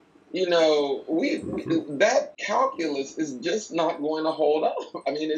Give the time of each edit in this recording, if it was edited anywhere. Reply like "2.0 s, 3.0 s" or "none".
2.4 s